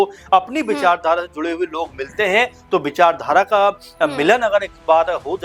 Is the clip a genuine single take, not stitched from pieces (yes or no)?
yes